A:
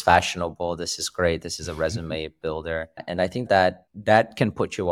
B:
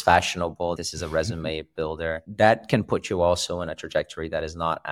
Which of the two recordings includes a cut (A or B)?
B